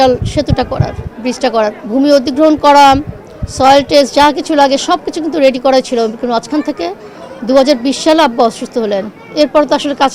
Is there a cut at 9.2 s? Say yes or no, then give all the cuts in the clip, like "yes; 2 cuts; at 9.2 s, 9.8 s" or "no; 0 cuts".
yes; 2 cuts; at 1.8 s, 9.2 s